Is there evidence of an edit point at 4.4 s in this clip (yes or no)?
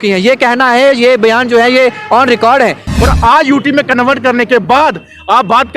no